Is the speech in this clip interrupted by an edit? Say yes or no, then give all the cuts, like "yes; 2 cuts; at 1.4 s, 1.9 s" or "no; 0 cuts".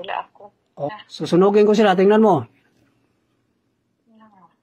yes; 1 cut; at 0.9 s